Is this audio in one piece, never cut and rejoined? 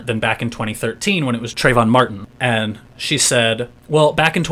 no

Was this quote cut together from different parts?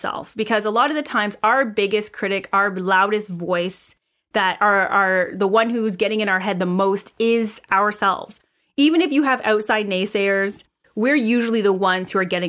yes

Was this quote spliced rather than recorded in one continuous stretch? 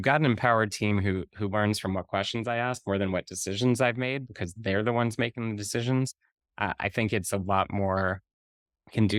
no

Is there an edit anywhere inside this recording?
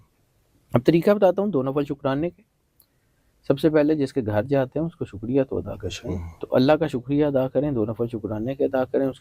yes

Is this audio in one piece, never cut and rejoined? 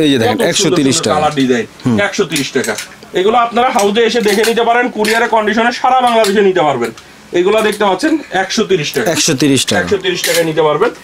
yes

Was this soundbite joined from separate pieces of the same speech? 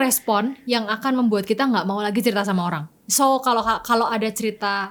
no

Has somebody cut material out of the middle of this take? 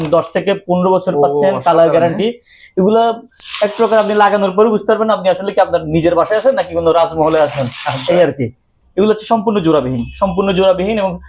no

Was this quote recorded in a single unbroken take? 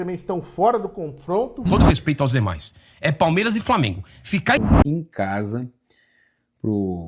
no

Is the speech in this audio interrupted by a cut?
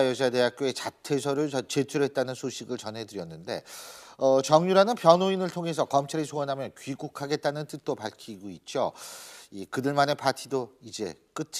no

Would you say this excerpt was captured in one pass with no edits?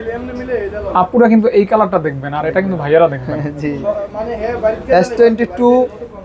yes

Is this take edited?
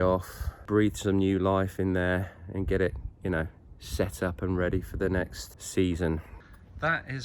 yes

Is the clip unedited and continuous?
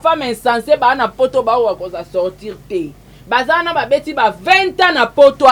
yes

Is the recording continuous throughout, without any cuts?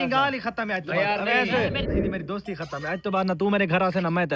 no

